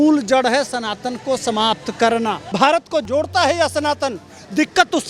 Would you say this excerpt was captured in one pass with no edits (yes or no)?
no